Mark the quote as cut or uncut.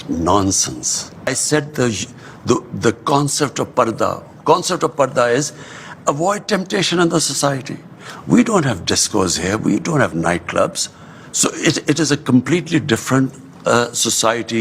cut